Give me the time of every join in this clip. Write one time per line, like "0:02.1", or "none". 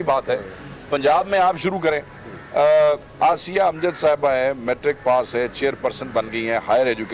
none

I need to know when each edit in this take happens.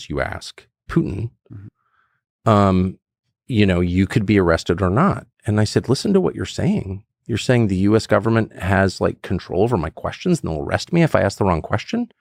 none

